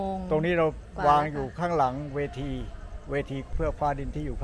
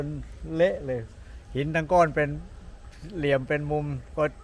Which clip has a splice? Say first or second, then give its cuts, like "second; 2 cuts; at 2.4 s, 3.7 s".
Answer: first; 1 cut; at 3.5 s